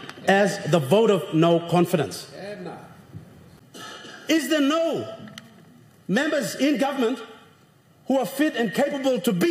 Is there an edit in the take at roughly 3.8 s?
yes; 1 cut; at 3.8 s

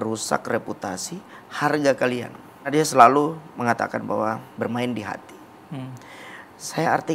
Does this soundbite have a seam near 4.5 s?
yes; 2 cuts; at 2.7 s, 4.5 s

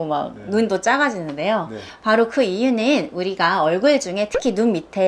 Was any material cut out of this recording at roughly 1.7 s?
no; 0 cuts

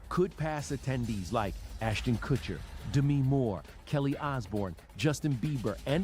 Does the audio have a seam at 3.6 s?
no; 0 cuts

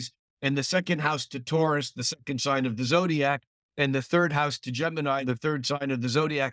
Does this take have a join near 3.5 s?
no; 1 cut; at 5.2 s

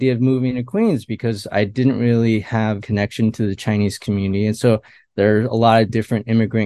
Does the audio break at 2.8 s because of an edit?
yes; 1 cut; at 2.8 s

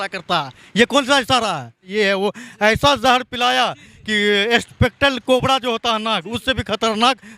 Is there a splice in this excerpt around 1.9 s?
yes; 1 cut; at 1.9 s

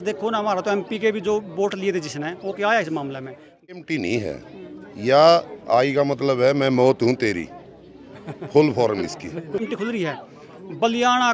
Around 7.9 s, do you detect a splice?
no; 2 cuts; at 3.7 s, 9.7 s

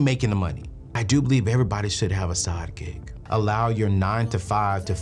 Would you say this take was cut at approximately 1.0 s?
yes; 2 cuts; at 1.0 s, 3.1 s

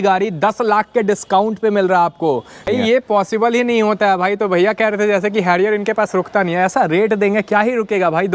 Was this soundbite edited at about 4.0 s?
no; 1 cut; at 2.7 s

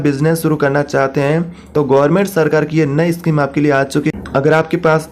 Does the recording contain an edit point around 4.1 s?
yes; 1 cut; at 4.1 s

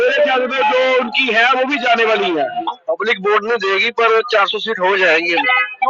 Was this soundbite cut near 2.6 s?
yes; 1 cut; at 2.6 s

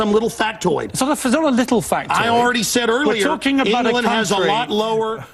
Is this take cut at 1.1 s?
no; 0 cuts

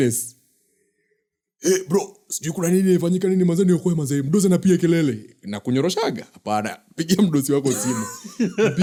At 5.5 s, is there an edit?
no; 0 cuts

